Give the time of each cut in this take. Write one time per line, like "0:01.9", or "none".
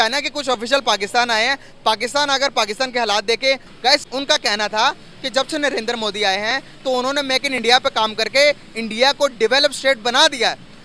0:03.7

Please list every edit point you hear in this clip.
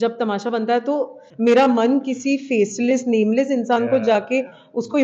0:01.2

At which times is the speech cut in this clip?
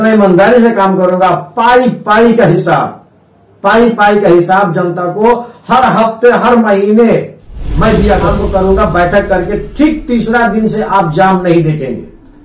0:08.4

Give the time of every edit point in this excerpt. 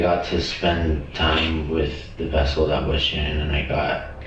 none

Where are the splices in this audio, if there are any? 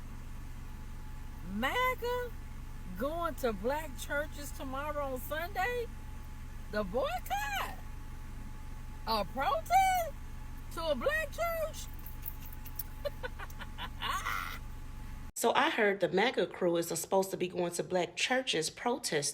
0:15.3

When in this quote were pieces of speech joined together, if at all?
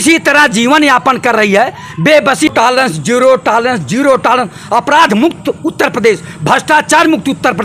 0:02.5

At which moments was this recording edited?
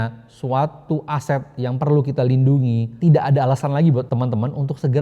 0:02.9
0:04.1

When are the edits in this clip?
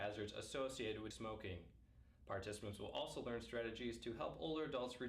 0:01.1

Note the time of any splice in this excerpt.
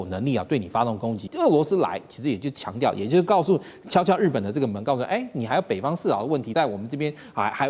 0:01.2
0:06.5

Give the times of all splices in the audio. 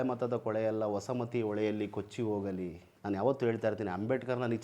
0:02.9

